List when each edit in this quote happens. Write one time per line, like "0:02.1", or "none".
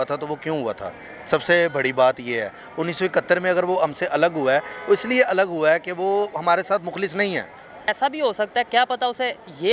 0:07.9